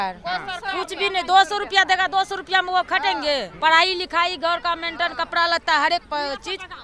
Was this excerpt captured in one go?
no; 1 cut; at 3.5 s

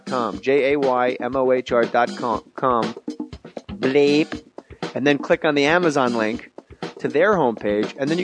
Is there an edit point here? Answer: yes; 1 cut; at 5.2 s

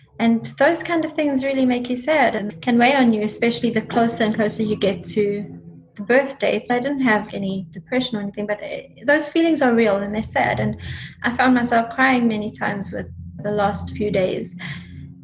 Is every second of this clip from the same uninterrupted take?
no; 4 cuts; at 2.4 s, 6.6 s, 7.3 s, 13.2 s

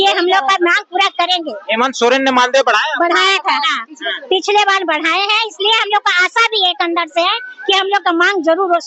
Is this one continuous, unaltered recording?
yes; 0 cuts

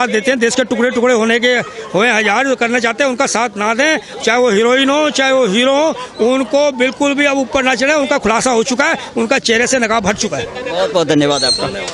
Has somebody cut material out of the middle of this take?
no; 0 cuts

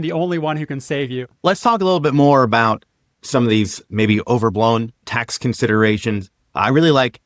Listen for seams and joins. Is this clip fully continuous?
no; 1 cut; at 1.4 s

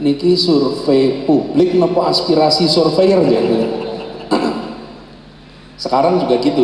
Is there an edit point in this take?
no; 0 cuts

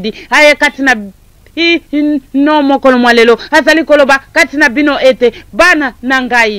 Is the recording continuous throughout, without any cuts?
yes; 0 cuts

